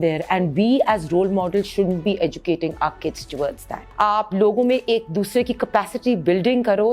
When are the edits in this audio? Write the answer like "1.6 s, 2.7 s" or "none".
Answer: 3.8 s